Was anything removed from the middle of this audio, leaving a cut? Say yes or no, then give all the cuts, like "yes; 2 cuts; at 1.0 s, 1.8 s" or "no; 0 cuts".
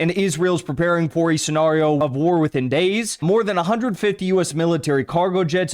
yes; 2 cuts; at 2.0 s, 3.1 s